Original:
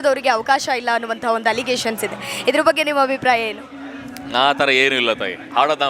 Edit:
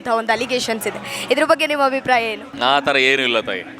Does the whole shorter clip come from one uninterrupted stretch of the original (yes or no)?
no